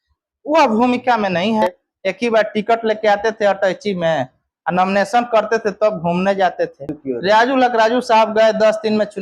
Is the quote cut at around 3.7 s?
no; 2 cuts; at 1.6 s, 7.0 s

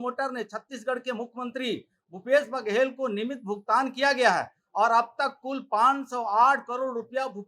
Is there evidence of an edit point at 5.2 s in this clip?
no; 0 cuts

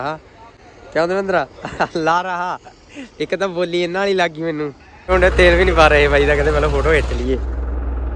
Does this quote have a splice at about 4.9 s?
yes; 1 cut; at 4.9 s

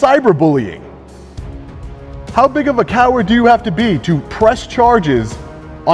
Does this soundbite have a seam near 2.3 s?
no; 0 cuts

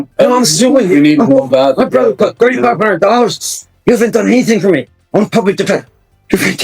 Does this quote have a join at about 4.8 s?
no; 0 cuts

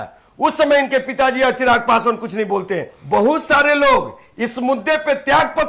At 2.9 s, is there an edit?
yes; 1 cut; at 2.9 s

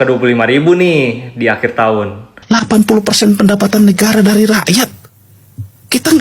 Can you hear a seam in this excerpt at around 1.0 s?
no; 1 cut; at 2.3 s

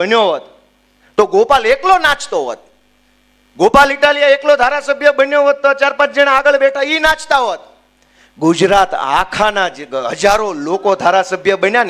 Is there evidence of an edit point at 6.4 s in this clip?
no; 0 cuts

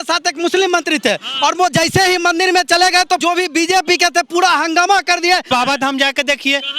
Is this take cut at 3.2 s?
yes; 2 cuts; at 3.2 s, 5.4 s

